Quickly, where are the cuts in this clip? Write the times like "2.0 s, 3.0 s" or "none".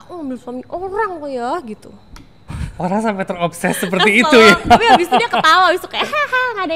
none